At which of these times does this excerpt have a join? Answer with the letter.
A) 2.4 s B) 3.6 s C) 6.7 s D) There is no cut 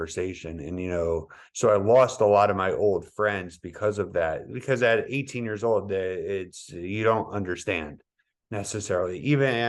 D